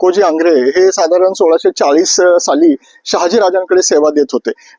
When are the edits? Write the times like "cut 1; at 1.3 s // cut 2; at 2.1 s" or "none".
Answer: none